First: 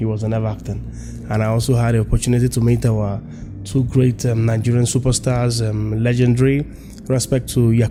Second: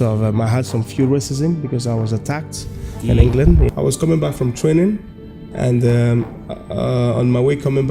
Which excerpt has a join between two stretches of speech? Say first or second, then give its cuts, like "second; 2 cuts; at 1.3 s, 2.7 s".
second; 1 cut; at 3.7 s